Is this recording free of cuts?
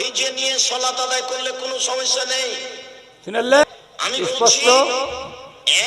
no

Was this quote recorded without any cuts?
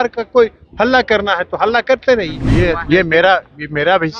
no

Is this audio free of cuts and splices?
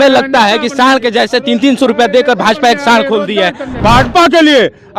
no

